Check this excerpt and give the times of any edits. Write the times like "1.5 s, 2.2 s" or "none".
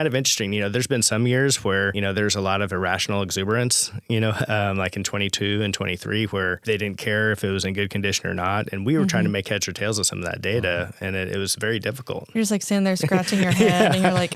1.9 s, 6.6 s